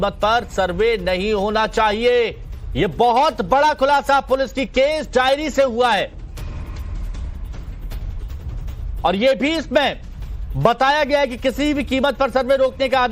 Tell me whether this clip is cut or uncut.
uncut